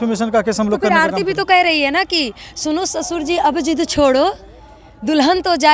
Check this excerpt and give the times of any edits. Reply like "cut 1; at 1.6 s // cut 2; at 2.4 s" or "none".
none